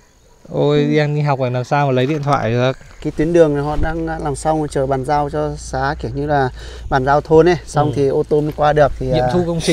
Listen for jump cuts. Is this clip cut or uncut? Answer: cut